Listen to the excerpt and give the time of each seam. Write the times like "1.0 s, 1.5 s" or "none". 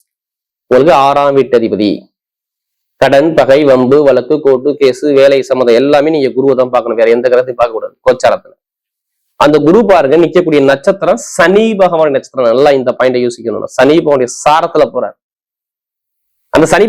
none